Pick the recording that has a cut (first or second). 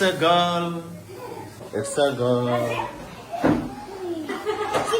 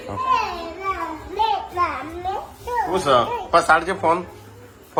first